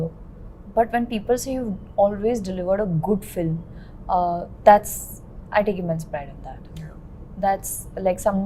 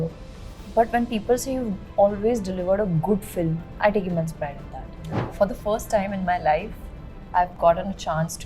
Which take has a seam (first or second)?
second